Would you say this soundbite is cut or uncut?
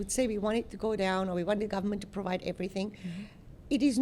uncut